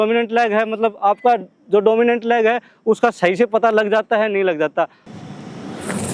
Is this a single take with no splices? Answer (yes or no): no